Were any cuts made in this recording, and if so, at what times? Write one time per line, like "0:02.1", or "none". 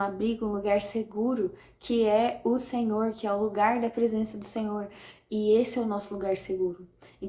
none